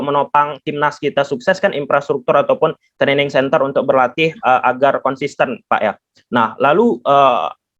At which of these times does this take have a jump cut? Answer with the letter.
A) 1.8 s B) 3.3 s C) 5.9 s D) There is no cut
D